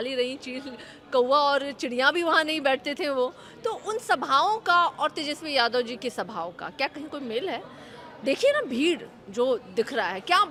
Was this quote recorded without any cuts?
yes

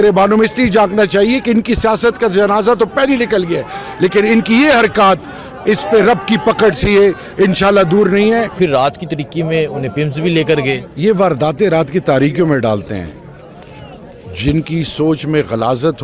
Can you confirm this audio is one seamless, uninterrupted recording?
no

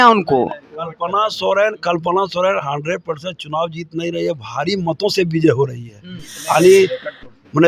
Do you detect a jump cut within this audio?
no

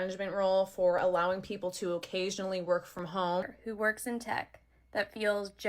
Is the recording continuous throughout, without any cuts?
no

